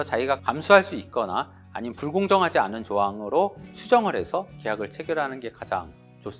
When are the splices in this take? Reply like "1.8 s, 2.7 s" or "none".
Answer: none